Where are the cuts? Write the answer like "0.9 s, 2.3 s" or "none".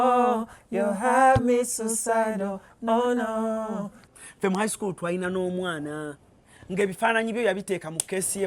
4.0 s

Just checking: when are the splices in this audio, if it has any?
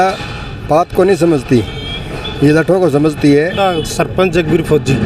3.6 s

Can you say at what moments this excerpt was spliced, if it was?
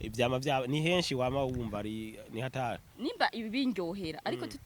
2.9 s

